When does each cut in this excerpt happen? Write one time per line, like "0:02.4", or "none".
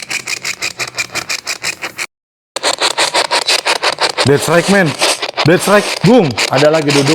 0:02.6